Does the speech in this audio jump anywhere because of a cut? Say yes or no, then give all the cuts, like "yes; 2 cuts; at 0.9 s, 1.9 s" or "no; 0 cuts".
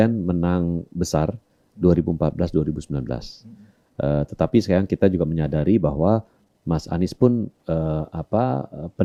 no; 0 cuts